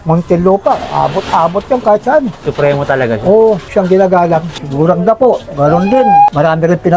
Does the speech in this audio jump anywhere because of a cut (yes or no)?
yes